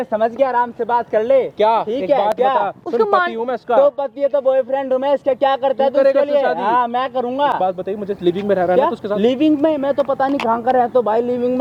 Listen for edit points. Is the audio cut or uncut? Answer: uncut